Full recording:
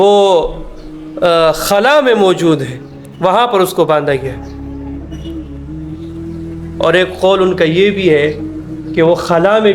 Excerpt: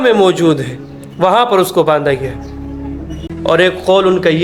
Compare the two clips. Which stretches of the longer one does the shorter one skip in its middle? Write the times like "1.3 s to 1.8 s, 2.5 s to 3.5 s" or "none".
5.3 s to 6.6 s